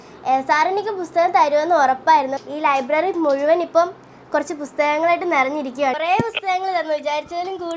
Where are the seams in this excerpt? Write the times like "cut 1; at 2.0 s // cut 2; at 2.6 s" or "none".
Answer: cut 1; at 2.3 s // cut 2; at 5.9 s